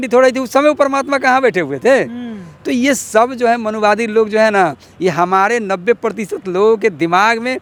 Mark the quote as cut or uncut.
uncut